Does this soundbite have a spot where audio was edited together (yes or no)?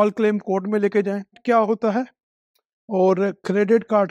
yes